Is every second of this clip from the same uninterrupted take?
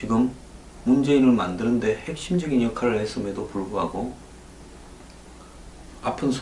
no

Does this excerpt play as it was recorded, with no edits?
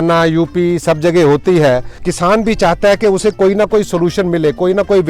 no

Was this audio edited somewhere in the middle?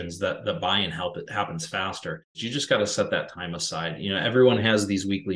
yes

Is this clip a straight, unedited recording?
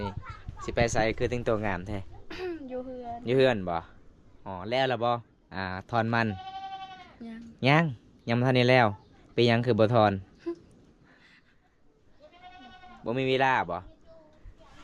yes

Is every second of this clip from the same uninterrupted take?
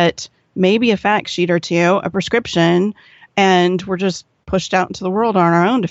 yes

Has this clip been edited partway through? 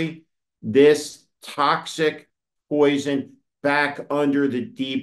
no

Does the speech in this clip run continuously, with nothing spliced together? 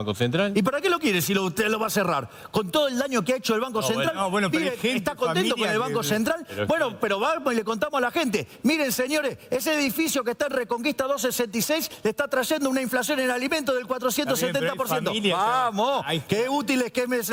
yes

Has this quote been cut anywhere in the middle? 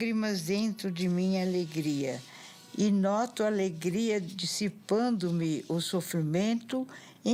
no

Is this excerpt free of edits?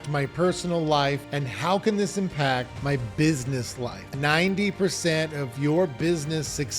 no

